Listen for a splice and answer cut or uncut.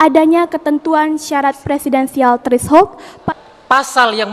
cut